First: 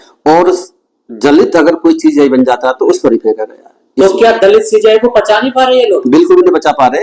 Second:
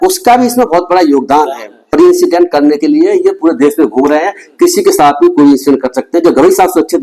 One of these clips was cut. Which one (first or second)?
second